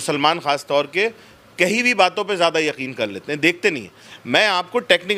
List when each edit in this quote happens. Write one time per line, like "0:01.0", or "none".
none